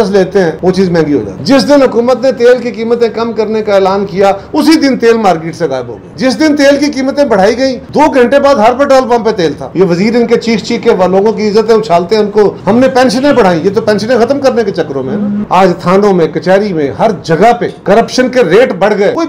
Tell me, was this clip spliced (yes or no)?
yes